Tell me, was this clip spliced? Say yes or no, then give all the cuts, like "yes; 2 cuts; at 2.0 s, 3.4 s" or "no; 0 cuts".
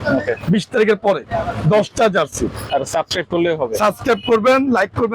yes; 1 cut; at 2.6 s